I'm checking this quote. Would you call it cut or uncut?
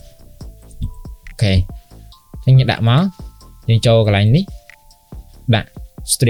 uncut